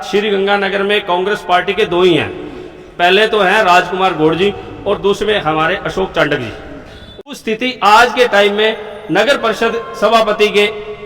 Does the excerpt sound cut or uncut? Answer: cut